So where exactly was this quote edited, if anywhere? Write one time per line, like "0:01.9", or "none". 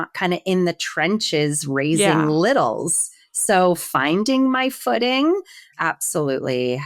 0:05.7